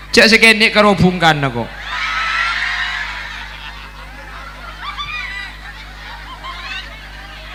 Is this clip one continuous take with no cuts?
yes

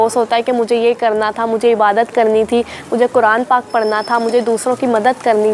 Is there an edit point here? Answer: no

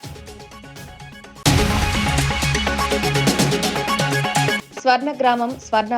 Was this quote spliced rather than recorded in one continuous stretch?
yes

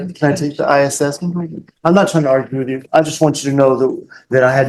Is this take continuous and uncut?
yes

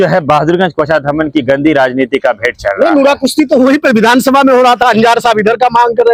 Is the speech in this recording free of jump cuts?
yes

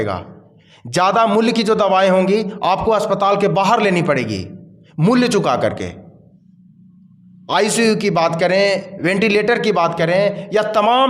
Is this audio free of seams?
yes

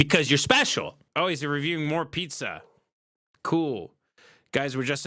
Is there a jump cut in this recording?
yes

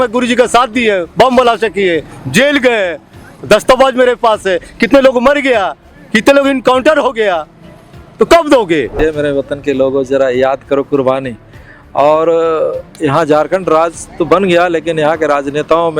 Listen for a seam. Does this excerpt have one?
yes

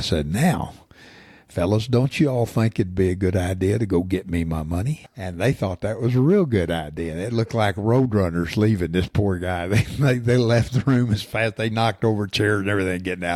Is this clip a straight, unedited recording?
no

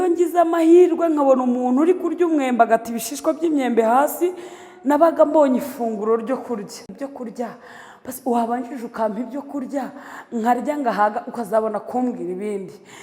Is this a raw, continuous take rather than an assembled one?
no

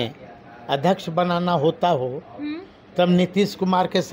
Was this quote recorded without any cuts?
yes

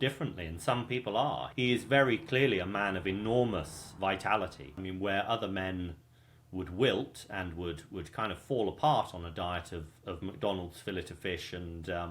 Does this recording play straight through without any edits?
no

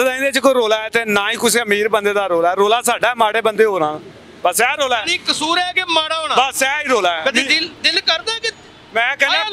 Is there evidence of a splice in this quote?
no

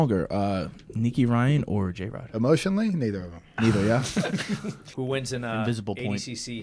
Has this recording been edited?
yes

